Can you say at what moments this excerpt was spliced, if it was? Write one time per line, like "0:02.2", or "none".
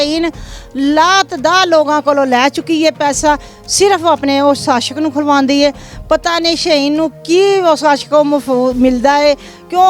none